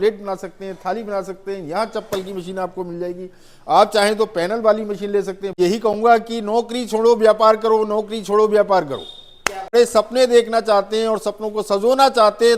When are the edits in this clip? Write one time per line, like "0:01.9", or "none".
0:05.5
0:09.7